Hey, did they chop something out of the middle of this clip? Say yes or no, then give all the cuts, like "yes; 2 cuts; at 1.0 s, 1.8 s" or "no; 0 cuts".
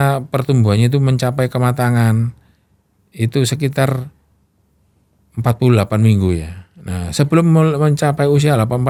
no; 0 cuts